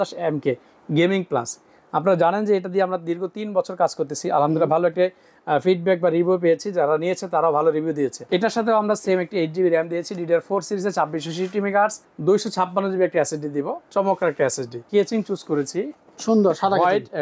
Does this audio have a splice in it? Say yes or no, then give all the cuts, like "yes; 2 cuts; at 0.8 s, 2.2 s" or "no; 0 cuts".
yes; 3 cuts; at 8.2 s, 12.1 s, 14.8 s